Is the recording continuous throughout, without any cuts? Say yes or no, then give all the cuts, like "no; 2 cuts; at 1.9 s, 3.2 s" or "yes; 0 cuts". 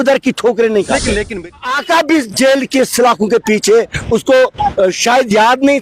no; 1 cut; at 1.5 s